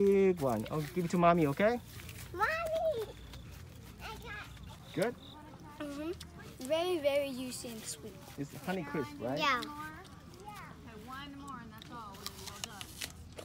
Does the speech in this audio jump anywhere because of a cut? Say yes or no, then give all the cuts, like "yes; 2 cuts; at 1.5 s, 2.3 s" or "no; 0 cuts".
yes; 1 cut; at 4.8 s